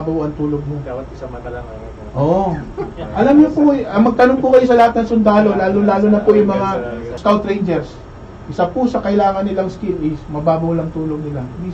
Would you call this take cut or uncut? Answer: cut